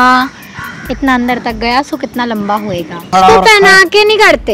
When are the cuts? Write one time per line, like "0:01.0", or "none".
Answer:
0:03.1